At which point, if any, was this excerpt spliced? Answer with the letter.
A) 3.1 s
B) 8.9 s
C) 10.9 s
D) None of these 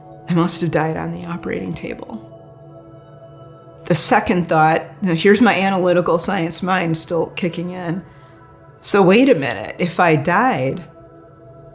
C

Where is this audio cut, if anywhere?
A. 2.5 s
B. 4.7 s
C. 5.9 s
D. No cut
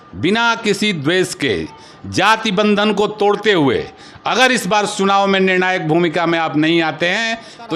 D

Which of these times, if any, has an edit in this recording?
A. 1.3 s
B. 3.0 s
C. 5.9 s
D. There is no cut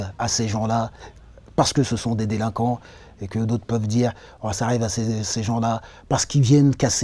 D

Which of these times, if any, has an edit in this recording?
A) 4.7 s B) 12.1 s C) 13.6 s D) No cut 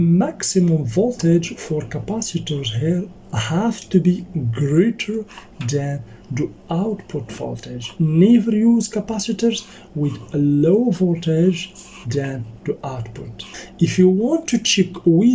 C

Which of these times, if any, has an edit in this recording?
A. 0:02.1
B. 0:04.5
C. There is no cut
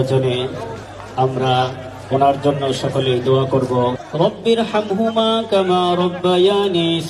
C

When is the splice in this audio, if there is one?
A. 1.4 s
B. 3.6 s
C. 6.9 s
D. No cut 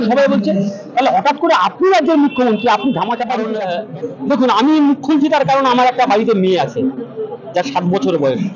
B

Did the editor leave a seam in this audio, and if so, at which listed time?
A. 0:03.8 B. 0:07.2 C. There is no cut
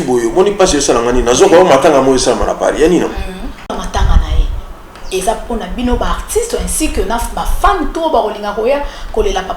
A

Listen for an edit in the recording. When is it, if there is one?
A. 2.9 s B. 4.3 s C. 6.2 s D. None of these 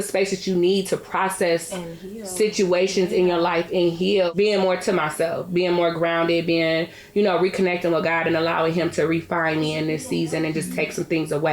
B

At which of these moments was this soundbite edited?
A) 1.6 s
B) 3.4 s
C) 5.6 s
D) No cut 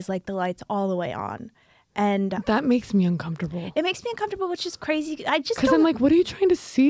D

